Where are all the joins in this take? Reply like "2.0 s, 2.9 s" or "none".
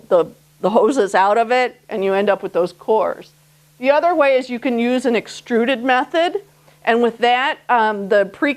6.1 s